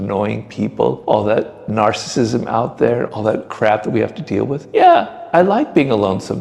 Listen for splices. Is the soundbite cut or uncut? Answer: cut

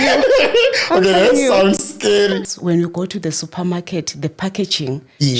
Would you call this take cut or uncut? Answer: cut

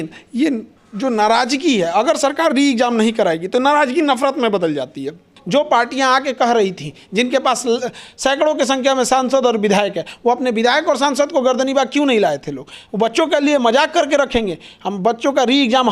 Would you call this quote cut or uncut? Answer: cut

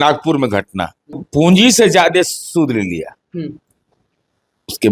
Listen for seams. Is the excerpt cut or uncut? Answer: cut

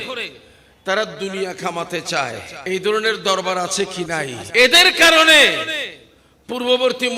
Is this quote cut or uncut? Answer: cut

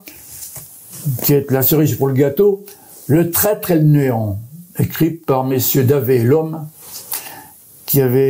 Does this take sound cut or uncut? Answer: uncut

